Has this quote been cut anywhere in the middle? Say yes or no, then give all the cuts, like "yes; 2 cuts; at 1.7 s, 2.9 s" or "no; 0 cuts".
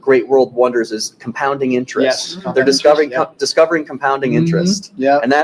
no; 0 cuts